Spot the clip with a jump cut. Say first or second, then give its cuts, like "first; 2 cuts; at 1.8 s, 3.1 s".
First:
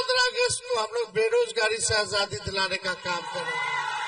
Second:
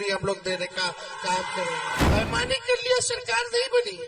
second; 1 cut; at 2.1 s